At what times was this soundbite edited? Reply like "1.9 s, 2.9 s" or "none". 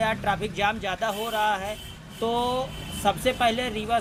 none

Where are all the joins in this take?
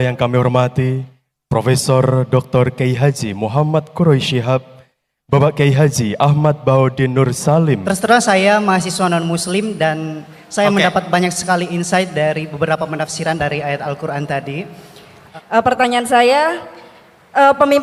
7.8 s, 15.2 s

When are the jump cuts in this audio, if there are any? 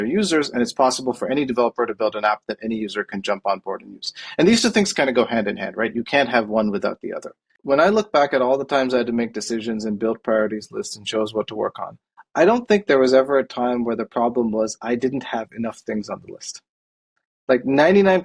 7.5 s

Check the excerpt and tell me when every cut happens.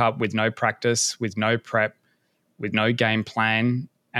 none

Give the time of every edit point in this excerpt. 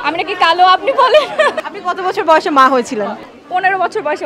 1.7 s, 3.3 s

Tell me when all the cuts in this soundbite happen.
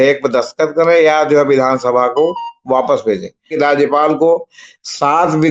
3.5 s

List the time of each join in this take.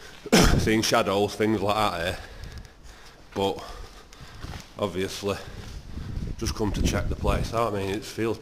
1.6 s

